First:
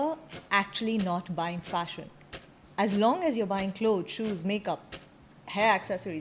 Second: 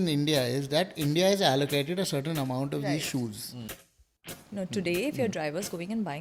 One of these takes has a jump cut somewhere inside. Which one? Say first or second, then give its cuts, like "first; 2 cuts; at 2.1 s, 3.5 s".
second; 1 cut; at 4.2 s